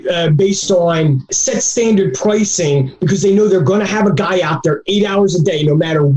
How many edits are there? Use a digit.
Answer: 0